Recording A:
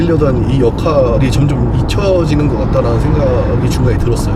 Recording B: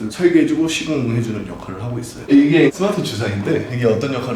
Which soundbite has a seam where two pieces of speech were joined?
B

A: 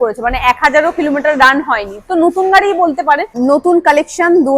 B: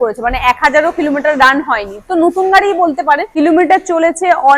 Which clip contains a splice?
A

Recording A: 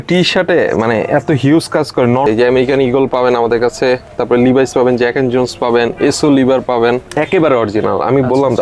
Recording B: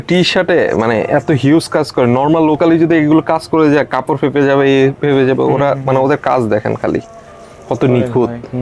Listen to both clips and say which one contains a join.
A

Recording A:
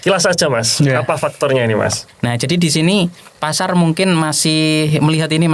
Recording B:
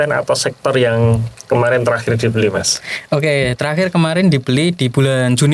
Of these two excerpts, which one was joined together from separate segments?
A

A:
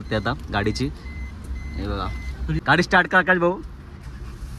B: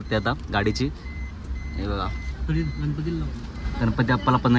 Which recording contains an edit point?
A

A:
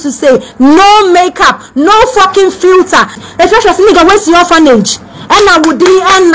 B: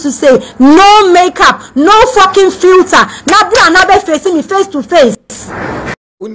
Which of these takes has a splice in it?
A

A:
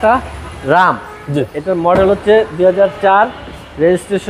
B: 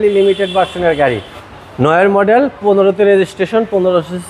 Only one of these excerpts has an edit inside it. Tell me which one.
B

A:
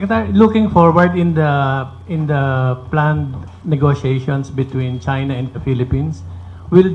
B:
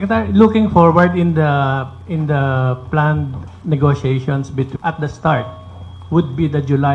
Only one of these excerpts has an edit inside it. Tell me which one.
A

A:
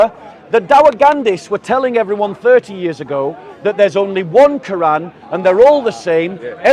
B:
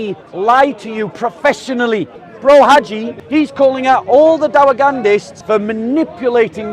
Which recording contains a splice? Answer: B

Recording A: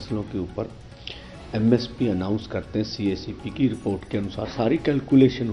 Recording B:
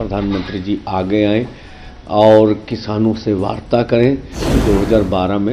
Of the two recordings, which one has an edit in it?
B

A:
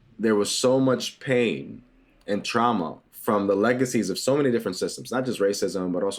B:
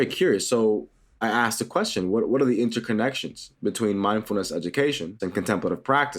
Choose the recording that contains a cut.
B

